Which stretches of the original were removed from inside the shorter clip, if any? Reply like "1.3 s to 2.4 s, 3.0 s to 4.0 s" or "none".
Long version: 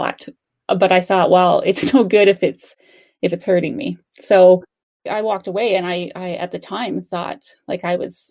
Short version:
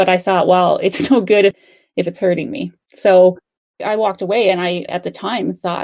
2.4 s to 2.8 s, 6.1 s to 6.4 s